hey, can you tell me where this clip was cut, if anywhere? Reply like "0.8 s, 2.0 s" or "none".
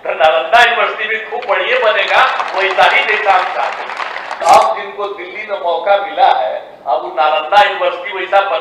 4.4 s